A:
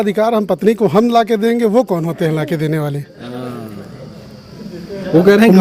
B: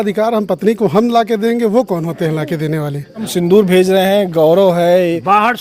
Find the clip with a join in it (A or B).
B